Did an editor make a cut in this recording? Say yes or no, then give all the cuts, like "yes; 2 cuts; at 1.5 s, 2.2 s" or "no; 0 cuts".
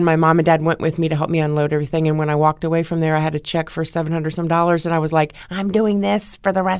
no; 0 cuts